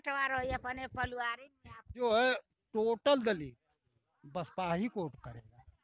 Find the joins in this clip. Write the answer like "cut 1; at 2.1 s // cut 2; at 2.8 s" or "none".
cut 1; at 2.0 s